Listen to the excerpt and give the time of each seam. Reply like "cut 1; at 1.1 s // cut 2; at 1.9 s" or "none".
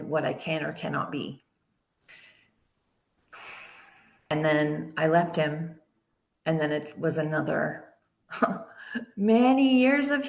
cut 1; at 4.3 s